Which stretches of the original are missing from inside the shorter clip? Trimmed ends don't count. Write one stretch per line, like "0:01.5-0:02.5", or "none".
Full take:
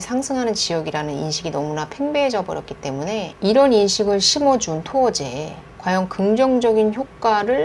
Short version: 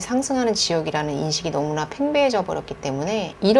none